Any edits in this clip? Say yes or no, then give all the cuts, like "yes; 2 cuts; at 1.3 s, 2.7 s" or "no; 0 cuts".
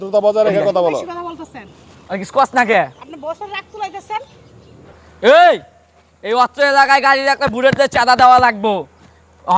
yes; 1 cut; at 5.0 s